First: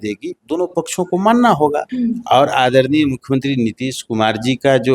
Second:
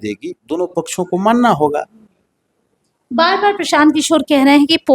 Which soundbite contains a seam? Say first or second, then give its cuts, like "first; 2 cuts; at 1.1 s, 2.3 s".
first; 1 cut; at 1.9 s